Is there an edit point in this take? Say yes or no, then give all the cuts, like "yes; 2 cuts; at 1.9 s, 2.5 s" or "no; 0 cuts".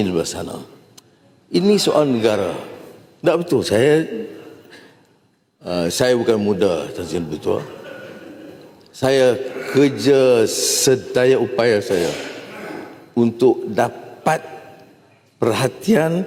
no; 0 cuts